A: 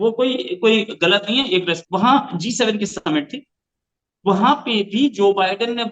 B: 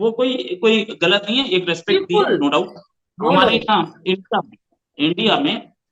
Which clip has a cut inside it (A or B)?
A